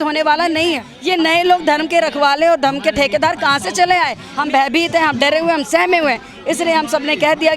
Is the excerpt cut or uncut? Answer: cut